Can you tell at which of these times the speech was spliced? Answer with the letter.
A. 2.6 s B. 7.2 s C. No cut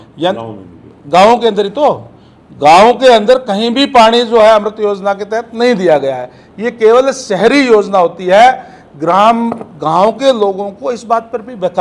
C